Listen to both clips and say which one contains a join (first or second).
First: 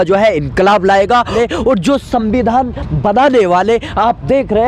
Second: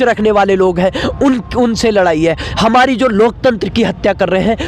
first